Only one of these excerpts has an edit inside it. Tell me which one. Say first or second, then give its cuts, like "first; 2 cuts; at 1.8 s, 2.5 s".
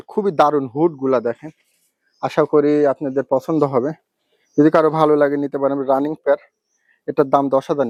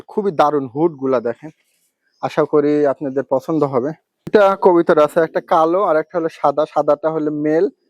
second; 1 cut; at 4.3 s